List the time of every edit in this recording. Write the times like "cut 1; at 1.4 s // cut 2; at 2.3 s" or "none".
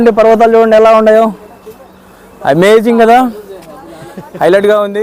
none